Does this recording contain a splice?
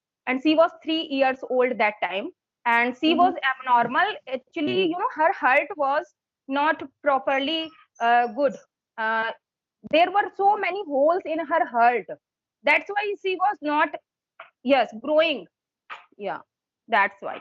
no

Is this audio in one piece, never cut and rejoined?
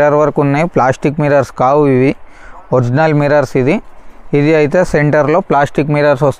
yes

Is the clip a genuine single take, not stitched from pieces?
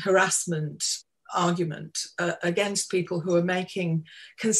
no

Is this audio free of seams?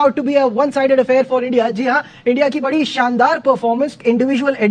yes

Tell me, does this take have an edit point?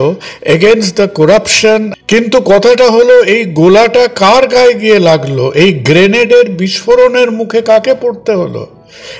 yes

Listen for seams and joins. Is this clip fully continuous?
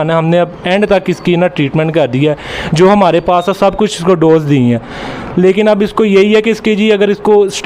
yes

